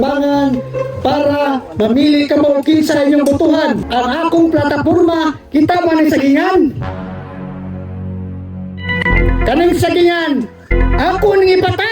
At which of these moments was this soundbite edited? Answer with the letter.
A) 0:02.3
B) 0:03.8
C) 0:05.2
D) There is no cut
B